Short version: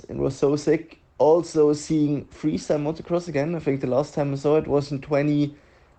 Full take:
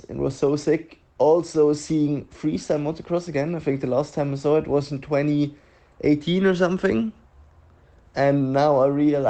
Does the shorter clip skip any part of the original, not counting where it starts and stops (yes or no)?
no